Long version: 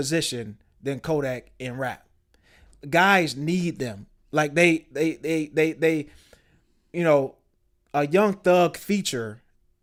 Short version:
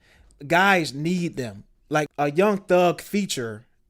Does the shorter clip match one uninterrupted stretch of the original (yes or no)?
no